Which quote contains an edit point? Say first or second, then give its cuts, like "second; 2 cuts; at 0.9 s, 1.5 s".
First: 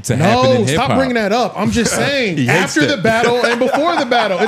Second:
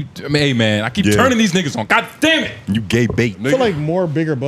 second; 1 cut; at 3.4 s